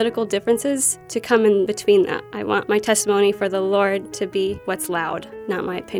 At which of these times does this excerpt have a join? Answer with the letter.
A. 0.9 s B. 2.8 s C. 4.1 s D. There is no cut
D